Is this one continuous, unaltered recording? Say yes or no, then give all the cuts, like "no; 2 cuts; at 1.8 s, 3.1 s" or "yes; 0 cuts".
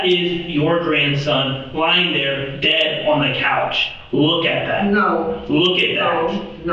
yes; 0 cuts